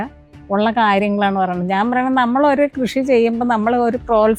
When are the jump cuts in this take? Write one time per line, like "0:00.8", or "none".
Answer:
none